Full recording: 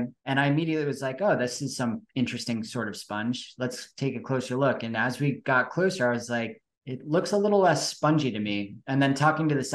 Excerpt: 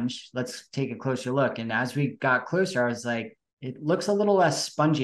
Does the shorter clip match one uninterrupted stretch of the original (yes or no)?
yes